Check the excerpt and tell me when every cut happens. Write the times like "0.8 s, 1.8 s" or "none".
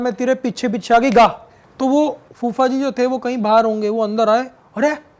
1.5 s